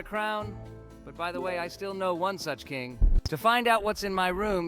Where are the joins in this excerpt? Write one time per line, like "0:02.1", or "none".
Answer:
0:03.1